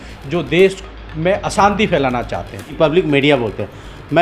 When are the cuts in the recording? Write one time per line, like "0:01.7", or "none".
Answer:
0:02.7